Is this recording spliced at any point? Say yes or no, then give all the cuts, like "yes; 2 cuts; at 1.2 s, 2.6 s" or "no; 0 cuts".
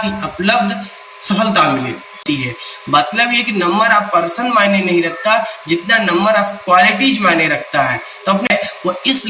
yes; 2 cuts; at 2.2 s, 8.5 s